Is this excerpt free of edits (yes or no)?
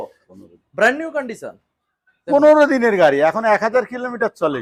yes